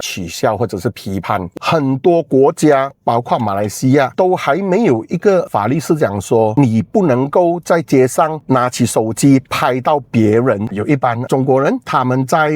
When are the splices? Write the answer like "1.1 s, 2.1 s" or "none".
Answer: 1.5 s, 10.8 s